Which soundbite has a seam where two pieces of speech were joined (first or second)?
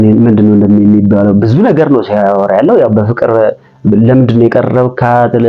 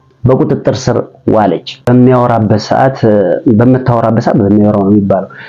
second